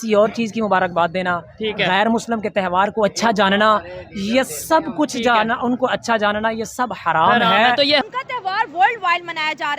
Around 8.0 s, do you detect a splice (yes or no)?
yes